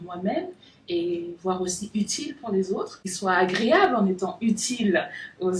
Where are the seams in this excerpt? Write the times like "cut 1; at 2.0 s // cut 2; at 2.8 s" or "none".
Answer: cut 1; at 3.0 s